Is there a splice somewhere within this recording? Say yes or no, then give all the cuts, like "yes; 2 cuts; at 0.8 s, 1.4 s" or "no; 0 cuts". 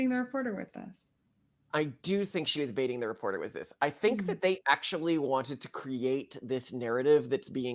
no; 0 cuts